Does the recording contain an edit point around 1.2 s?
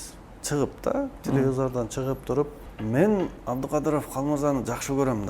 no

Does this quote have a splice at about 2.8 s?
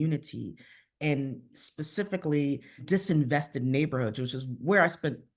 yes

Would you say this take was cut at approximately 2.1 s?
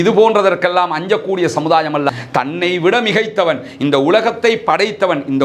yes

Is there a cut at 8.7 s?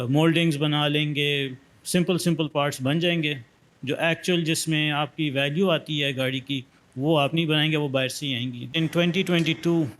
yes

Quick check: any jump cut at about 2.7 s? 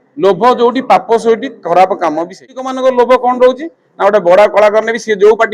yes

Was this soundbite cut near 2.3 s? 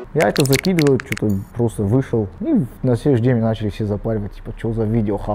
yes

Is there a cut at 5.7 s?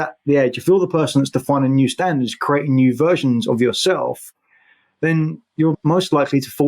yes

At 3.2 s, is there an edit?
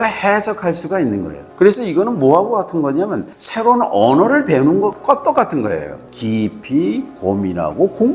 no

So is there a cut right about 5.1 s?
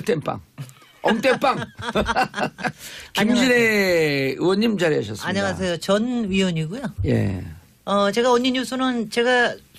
yes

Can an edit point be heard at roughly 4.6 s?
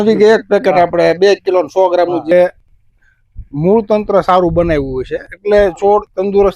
no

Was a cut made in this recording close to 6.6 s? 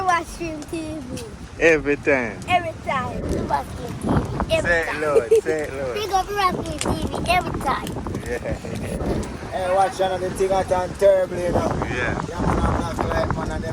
no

